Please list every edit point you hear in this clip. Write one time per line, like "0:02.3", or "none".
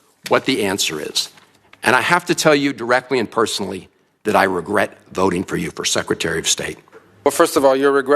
0:07.3